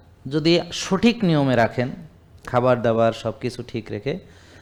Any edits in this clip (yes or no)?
no